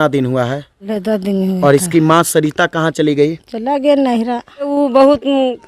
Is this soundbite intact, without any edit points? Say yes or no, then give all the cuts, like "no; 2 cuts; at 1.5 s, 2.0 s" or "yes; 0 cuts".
no; 2 cuts; at 0.8 s, 4.7 s